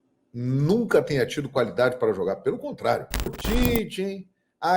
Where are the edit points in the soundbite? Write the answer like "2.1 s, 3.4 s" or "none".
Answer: 3.4 s